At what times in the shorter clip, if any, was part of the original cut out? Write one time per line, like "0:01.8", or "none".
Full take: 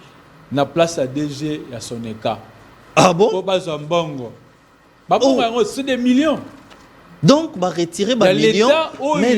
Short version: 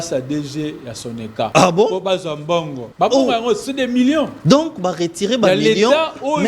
0:01.5
0:02.8
0:04.3